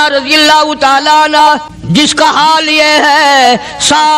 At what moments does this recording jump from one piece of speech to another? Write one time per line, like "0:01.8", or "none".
0:01.7